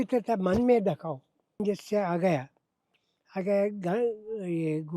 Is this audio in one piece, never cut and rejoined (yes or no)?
no